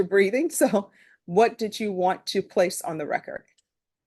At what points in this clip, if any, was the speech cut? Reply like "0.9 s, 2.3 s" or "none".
none